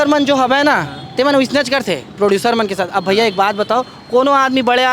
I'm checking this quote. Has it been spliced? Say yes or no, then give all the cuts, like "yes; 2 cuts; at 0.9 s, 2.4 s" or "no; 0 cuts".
no; 0 cuts